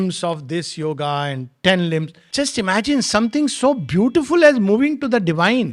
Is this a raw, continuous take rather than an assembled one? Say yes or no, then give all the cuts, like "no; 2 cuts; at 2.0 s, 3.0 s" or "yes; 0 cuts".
no; 1 cut; at 2.2 s